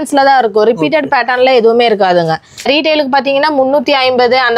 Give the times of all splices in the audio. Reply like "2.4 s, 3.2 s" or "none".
2.6 s

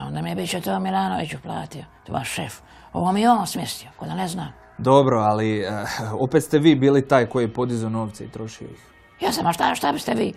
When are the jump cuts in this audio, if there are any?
none

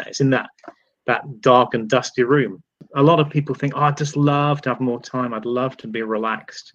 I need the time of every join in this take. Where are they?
2.8 s

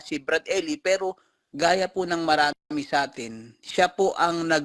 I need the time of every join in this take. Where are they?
none

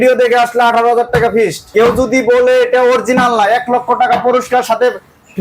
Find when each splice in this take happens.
1.6 s

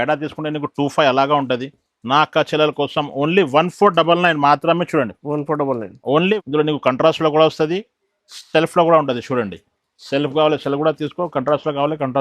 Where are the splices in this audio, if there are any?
6.3 s

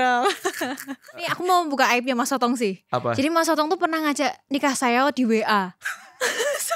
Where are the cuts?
1.3 s

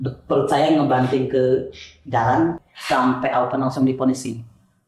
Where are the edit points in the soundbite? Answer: 2.6 s

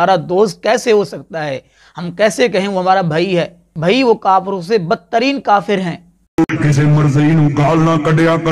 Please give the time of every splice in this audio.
3.6 s, 6.4 s

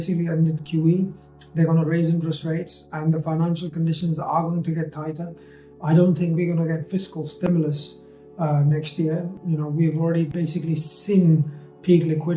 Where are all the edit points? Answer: 9.3 s

